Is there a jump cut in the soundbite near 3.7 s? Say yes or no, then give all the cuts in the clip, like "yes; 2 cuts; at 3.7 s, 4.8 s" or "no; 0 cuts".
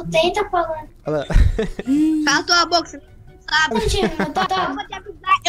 yes; 1 cut; at 3.7 s